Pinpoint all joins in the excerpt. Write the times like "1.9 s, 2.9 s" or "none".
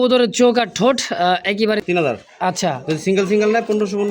1.8 s